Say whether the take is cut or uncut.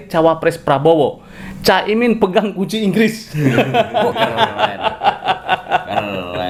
uncut